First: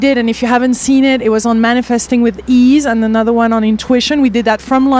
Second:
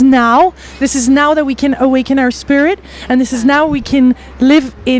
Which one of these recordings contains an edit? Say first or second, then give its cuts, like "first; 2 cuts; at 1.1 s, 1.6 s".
first; 1 cut; at 3.2 s